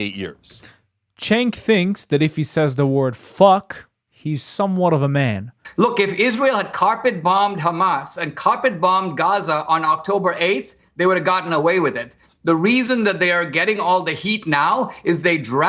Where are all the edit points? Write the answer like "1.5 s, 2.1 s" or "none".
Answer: 5.6 s